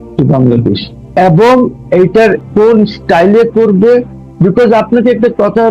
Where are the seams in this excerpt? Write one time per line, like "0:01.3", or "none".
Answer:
0:01.1
0:02.4